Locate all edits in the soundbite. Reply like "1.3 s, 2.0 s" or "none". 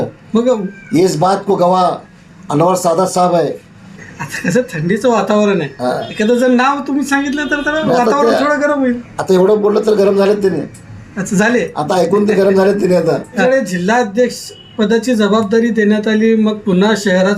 4.0 s, 13.4 s